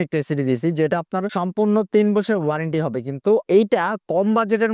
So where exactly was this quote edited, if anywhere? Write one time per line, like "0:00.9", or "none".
0:03.5